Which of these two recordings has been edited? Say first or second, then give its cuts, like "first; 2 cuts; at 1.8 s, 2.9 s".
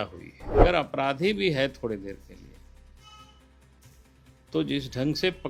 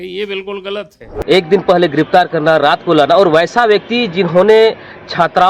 second; 1 cut; at 1.0 s